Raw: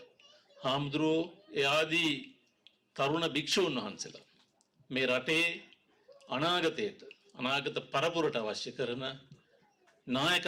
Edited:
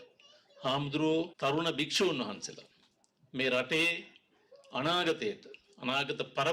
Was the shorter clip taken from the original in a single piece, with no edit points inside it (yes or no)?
no